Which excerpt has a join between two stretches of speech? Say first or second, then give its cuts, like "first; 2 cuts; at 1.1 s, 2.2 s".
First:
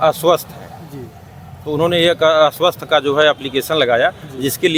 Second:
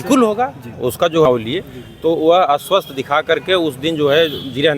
second; 1 cut; at 1.3 s